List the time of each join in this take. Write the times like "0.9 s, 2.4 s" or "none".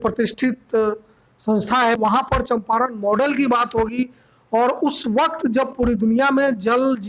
2.0 s